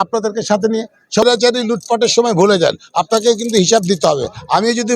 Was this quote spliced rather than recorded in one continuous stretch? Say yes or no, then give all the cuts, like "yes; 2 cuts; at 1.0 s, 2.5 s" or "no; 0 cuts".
yes; 1 cut; at 1.2 s